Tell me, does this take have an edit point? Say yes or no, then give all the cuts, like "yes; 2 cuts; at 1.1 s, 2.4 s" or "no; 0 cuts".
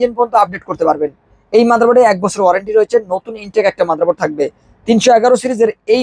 no; 0 cuts